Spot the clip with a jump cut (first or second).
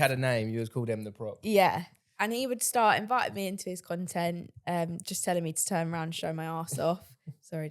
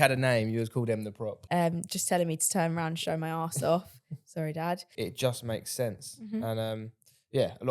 second